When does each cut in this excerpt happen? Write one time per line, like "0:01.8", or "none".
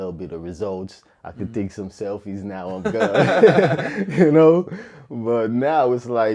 none